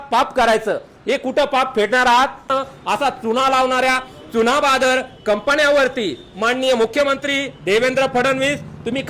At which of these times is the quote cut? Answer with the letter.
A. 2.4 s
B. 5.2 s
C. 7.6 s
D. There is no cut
A